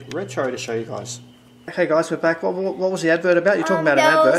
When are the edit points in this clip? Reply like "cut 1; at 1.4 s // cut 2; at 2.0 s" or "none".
cut 1; at 1.7 s

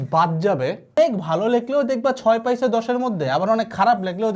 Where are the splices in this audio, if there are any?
cut 1; at 0.9 s

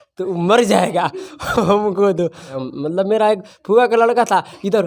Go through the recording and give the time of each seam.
cut 1; at 2.6 s

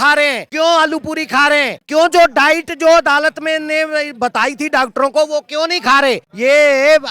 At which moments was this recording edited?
none

